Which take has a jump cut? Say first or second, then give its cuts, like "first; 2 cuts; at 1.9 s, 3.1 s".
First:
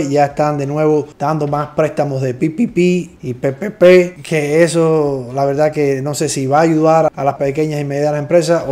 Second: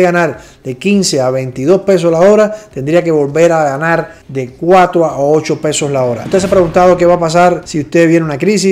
second; 1 cut; at 6.2 s